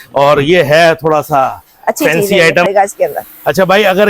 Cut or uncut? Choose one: cut